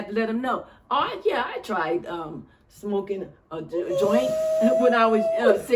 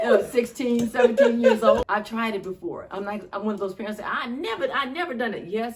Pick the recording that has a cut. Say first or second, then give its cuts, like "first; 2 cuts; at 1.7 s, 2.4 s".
second; 1 cut; at 1.8 s